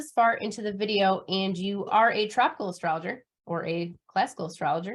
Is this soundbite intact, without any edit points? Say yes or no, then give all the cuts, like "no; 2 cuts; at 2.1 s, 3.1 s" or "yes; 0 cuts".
no; 1 cut; at 1.9 s